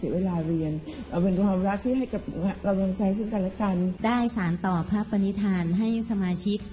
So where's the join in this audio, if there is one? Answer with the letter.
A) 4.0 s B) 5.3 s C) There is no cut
A